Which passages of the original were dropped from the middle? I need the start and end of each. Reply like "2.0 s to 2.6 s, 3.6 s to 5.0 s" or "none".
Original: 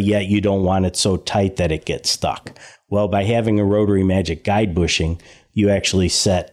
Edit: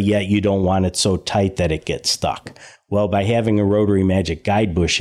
none